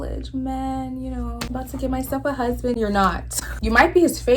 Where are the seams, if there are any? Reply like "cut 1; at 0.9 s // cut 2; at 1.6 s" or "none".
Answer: cut 1; at 1.4 s // cut 2; at 3.5 s